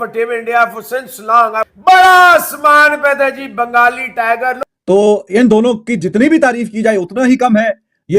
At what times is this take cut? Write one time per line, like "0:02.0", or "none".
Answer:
0:04.7